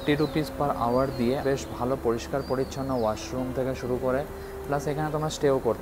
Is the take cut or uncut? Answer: uncut